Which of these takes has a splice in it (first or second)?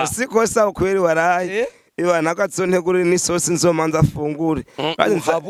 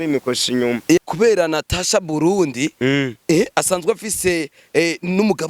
second